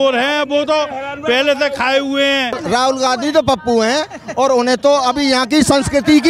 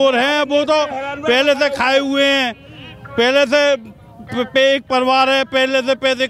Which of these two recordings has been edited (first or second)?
first